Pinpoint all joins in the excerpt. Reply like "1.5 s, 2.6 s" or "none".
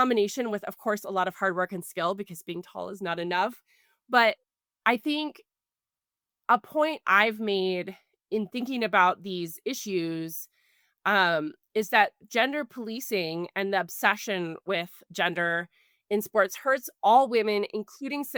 none